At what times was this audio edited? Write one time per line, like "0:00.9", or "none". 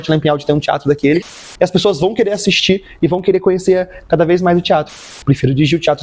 0:01.4
0:05.0